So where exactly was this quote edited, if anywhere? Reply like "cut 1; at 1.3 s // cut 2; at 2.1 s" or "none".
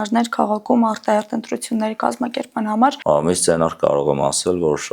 cut 1; at 3.0 s